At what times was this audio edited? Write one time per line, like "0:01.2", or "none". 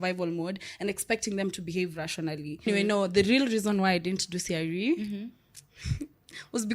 0:02.7